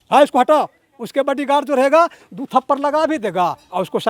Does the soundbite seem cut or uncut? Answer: uncut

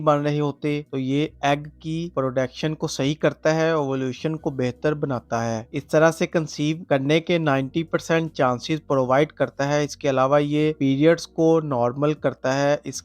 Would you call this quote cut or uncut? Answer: uncut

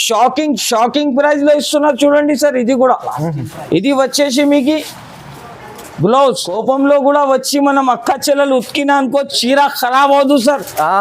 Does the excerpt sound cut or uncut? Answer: cut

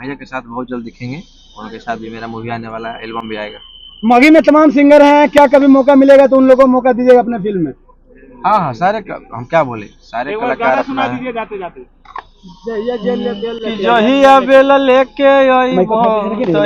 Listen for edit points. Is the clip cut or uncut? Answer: uncut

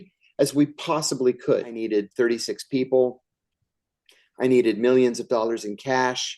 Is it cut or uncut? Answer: cut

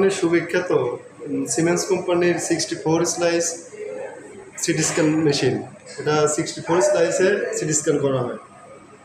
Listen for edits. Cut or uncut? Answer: uncut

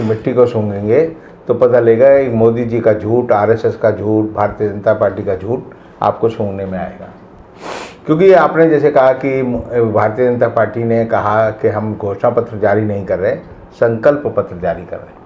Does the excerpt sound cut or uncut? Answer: uncut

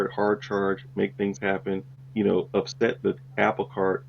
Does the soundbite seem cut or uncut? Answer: cut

